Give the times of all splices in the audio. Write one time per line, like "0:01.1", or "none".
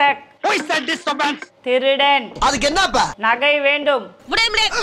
none